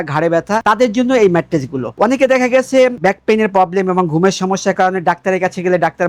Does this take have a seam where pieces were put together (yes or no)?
no